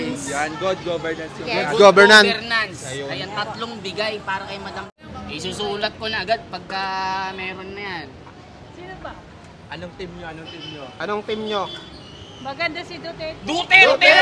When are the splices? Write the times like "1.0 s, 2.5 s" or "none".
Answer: 5.0 s